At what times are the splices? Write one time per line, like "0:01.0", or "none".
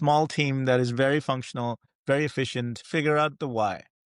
0:02.8